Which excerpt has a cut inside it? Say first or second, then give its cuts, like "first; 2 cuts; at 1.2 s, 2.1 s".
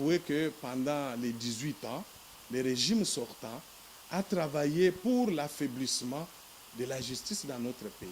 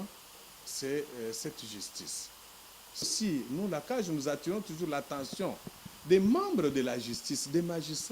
second; 1 cut; at 3.1 s